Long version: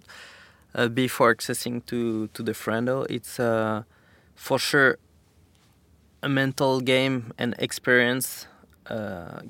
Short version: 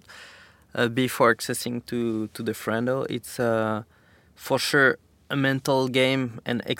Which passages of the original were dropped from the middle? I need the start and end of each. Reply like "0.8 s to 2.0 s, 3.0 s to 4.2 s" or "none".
5.1 s to 6.1 s